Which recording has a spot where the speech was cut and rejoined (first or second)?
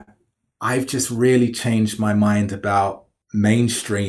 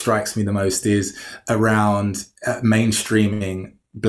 first